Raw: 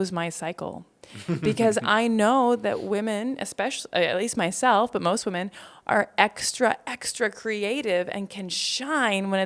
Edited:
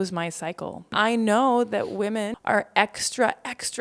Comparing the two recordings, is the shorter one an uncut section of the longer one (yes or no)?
no